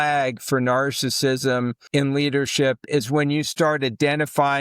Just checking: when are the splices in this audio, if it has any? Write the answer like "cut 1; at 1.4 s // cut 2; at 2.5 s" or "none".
cut 1; at 1.8 s